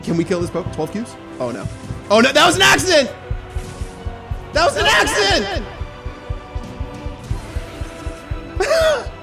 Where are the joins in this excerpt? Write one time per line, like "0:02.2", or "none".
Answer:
0:01.2